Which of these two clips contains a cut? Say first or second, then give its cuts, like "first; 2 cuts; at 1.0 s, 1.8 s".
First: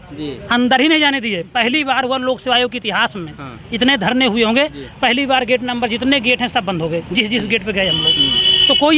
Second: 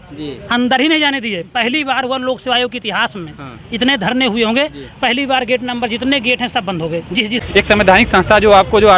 second; 1 cut; at 7.4 s